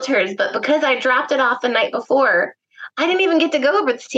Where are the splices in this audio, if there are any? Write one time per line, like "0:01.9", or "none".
none